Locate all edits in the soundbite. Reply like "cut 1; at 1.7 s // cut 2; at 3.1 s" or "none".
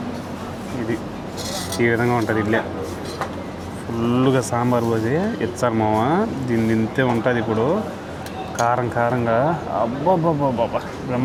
none